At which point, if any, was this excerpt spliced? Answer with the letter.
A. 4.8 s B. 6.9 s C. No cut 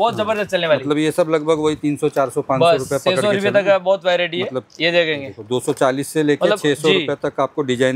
C